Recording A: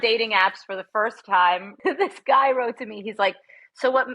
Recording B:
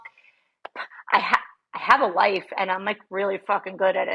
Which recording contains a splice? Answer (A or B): A